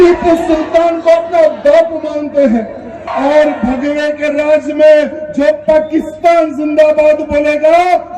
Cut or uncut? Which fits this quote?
cut